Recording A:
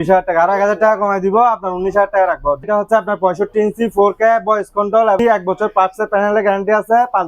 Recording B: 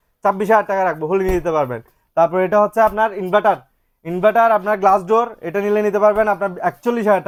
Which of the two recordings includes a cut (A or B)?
A